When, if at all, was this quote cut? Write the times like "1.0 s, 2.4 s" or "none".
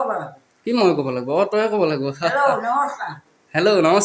none